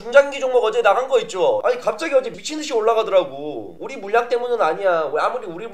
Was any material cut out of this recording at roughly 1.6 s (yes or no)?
yes